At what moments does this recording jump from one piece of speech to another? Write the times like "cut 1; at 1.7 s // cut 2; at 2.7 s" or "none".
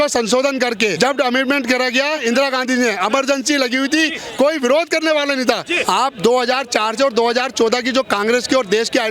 cut 1; at 1.0 s // cut 2; at 2.2 s // cut 3; at 5.7 s